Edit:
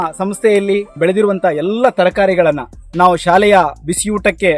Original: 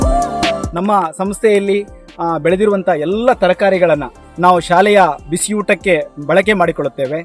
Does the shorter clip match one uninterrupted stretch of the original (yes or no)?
no